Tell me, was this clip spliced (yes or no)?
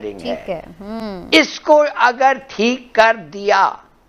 no